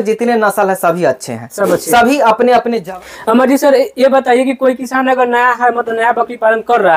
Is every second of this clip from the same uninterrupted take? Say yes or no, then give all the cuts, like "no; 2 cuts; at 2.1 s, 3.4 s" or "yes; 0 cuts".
no; 1 cut; at 2.9 s